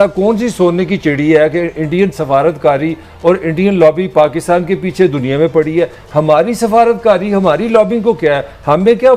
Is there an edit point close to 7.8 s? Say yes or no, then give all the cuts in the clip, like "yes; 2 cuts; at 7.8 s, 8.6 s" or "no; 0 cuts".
no; 0 cuts